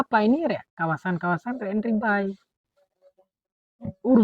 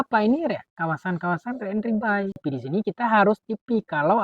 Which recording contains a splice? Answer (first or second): second